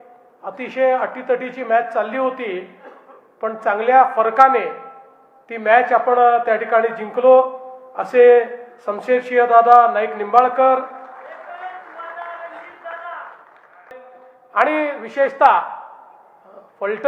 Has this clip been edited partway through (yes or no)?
yes